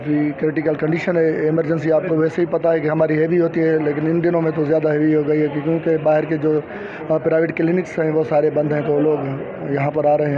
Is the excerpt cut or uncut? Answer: uncut